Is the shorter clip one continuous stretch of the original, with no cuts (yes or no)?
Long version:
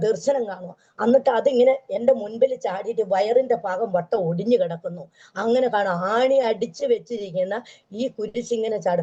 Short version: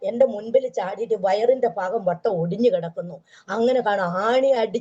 yes